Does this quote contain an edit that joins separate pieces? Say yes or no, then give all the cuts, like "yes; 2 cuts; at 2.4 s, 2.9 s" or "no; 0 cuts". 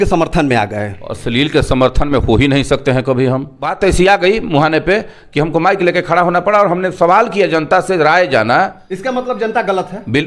yes; 2 cuts; at 3.6 s, 8.9 s